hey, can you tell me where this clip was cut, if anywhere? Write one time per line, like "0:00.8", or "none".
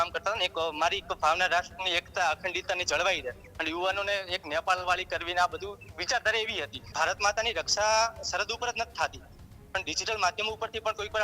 0:06.8